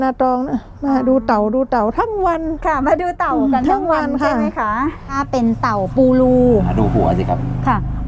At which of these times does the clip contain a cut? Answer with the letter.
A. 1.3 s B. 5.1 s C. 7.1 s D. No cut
B